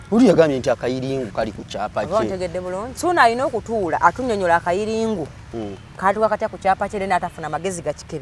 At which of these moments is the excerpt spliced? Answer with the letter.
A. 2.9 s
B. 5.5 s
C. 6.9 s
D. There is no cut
A